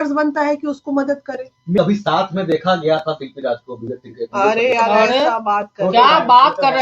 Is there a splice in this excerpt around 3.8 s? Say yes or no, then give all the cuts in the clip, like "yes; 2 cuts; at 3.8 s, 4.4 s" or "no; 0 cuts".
no; 1 cut; at 1.8 s